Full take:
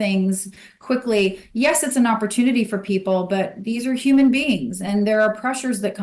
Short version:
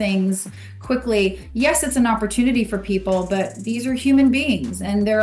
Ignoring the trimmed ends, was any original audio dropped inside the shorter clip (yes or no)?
no